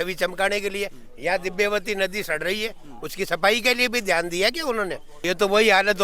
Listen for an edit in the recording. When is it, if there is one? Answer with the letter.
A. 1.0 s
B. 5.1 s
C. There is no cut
B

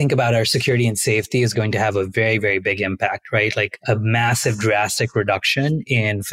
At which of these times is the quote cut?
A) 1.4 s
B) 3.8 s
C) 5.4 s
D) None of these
B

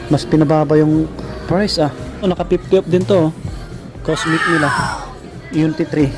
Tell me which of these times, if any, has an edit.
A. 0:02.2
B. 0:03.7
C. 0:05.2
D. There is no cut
A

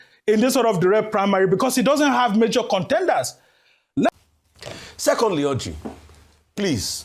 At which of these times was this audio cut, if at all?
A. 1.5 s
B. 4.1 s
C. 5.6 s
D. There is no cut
B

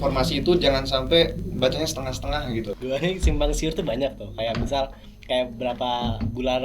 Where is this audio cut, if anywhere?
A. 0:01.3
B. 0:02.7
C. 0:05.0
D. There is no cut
B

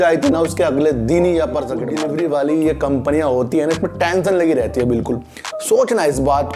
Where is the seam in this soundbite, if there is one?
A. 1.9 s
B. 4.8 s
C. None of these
A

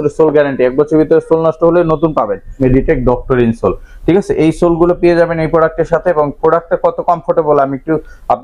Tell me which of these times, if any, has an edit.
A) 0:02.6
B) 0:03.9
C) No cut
A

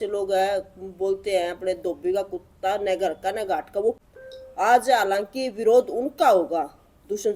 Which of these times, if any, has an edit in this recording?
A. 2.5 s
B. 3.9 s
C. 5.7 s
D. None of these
B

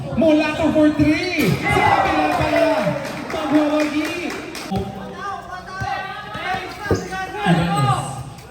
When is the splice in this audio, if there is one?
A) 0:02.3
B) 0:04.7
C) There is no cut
B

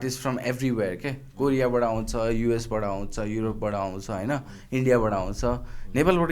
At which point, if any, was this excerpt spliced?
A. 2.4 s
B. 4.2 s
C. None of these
C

